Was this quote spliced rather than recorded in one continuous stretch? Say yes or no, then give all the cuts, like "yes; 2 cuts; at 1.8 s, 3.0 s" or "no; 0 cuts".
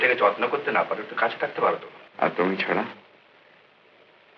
yes; 1 cut; at 2.0 s